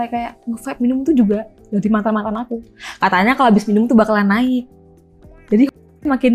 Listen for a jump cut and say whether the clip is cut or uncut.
uncut